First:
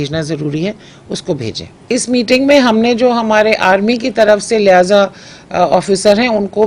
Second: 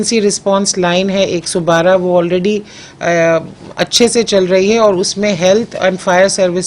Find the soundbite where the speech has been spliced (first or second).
first